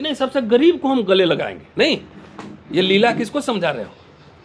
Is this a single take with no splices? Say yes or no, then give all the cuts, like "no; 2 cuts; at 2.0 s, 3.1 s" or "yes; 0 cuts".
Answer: yes; 0 cuts